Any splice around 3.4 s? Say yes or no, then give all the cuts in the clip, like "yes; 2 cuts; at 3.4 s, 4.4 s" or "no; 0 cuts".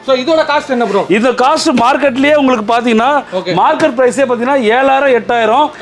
yes; 1 cut; at 3.4 s